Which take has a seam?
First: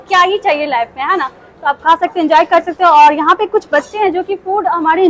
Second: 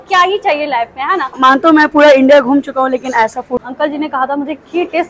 second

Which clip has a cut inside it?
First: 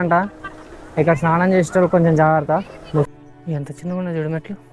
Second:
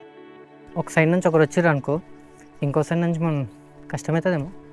first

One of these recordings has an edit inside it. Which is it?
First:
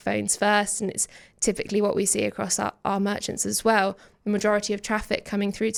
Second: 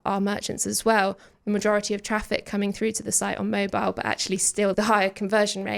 second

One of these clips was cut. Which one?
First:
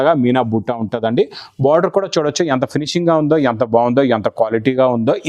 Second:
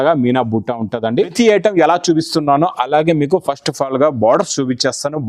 second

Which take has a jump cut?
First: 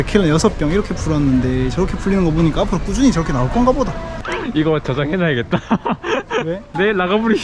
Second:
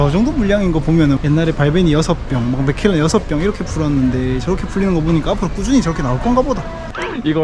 second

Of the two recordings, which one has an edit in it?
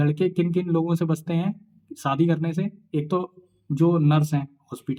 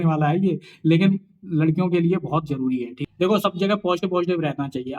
second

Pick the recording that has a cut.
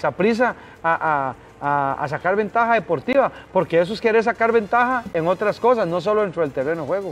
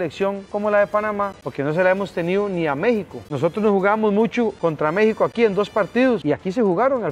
second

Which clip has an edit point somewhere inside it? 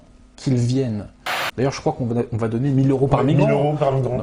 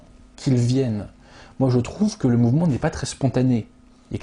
first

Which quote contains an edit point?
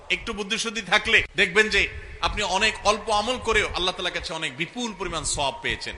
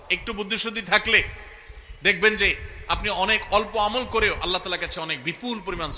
first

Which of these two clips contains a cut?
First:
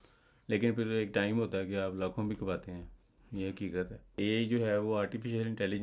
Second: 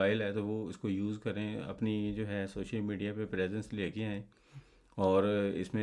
first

